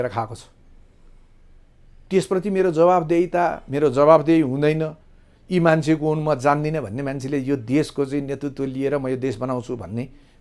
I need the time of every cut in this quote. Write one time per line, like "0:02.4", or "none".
none